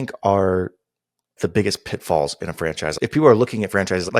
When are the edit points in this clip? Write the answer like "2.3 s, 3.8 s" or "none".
1.3 s, 3.0 s